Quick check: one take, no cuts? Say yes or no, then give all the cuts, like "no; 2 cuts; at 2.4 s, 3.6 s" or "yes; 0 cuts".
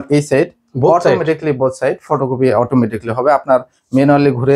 yes; 0 cuts